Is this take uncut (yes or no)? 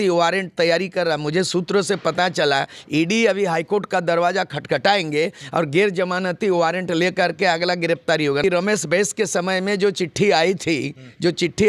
no